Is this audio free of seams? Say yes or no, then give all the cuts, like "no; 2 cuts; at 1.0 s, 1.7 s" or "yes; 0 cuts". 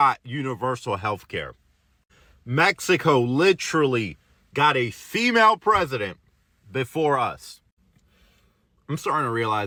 yes; 0 cuts